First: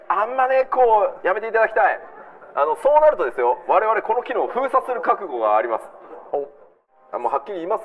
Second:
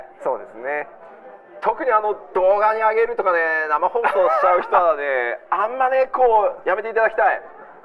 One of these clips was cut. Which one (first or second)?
first